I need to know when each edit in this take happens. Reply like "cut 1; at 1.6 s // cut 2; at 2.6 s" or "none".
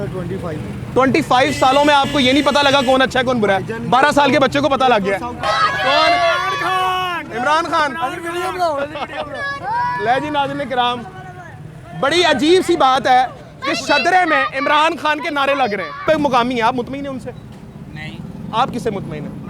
cut 1; at 5.4 s // cut 2; at 16.0 s